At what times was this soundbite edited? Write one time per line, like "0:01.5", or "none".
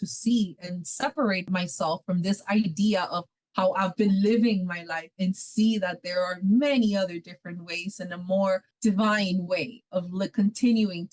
0:01.4
0:03.2
0:08.7

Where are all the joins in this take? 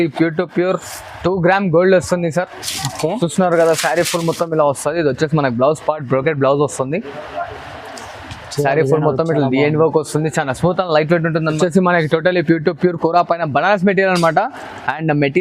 0:11.6

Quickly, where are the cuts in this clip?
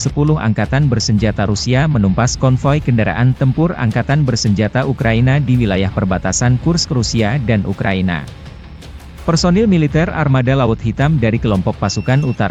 none

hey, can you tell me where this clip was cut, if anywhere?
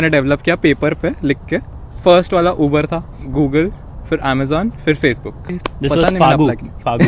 0:01.9
0:03.1

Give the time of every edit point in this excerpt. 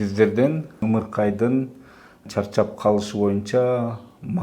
0:00.8
0:02.3

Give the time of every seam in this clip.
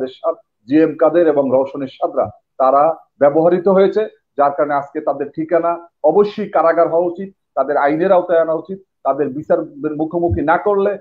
none

